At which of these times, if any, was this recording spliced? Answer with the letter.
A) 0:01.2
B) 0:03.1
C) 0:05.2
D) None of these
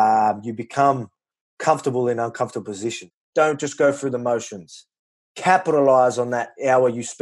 B